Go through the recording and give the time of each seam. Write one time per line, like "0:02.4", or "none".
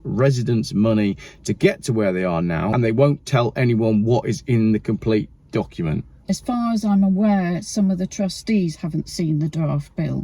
0:02.7
0:06.3

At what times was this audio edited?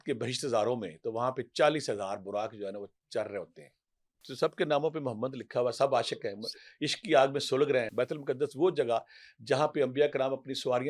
0:04.2
0:07.9

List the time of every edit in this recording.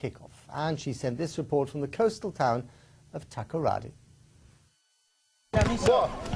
0:05.2

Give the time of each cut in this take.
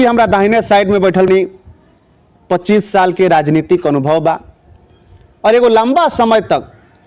0:01.3

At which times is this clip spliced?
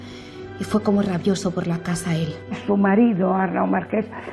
0:02.5

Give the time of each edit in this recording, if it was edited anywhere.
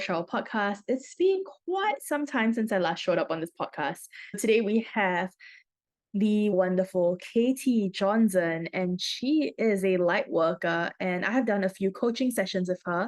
0:04.4
0:06.5

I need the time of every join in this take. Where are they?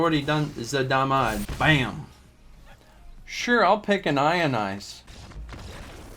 0:01.5
0:05.0

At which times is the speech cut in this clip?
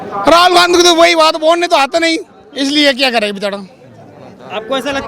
none

